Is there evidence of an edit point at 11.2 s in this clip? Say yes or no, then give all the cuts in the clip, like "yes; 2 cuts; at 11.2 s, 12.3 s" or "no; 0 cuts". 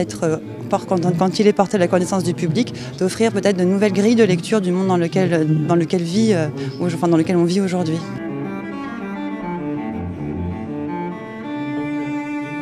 no; 0 cuts